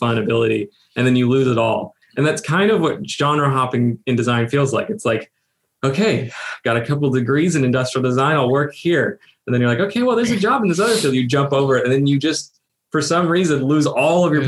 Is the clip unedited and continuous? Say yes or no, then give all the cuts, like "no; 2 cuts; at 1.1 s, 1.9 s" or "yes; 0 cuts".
yes; 0 cuts